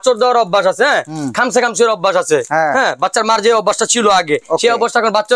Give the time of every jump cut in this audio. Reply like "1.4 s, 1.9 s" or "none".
none